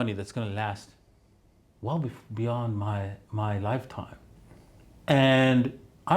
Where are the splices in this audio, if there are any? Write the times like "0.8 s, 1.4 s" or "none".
4.3 s